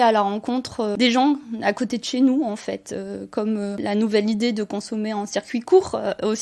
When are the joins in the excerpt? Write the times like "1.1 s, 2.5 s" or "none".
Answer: 0.9 s, 3.8 s